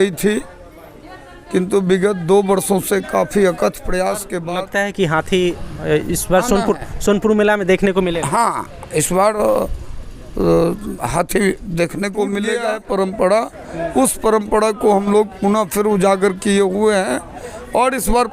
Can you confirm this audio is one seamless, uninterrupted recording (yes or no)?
no